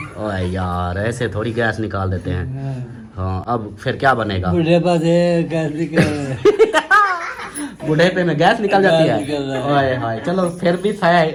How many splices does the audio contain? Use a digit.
0